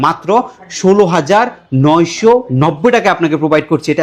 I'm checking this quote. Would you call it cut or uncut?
uncut